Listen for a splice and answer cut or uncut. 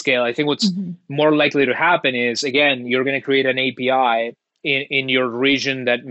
uncut